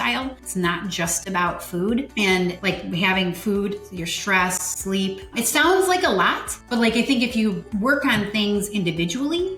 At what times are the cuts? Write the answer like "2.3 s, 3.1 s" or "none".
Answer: 2.7 s, 7.4 s